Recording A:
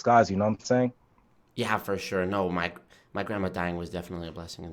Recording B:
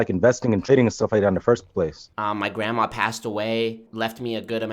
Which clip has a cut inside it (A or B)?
B